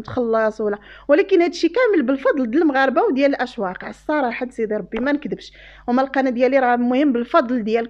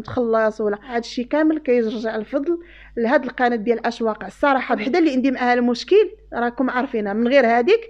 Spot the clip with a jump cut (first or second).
second